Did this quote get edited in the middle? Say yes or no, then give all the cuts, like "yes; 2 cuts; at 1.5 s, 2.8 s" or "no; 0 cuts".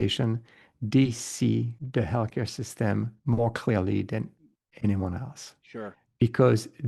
no; 0 cuts